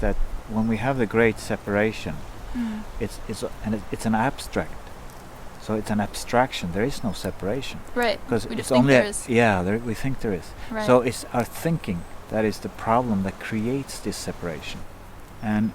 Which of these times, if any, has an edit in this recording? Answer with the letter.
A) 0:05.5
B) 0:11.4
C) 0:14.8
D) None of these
C